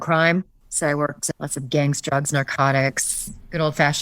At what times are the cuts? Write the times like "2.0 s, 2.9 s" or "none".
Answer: 1.2 s